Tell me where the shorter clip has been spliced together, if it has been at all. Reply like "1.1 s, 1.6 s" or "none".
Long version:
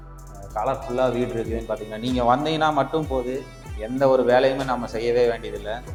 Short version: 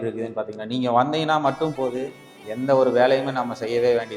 none